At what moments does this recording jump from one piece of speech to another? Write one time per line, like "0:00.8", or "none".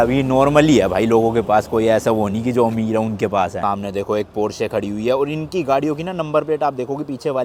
none